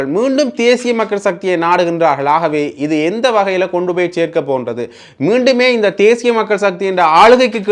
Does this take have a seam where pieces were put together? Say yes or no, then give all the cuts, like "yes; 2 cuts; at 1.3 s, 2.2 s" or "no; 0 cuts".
no; 0 cuts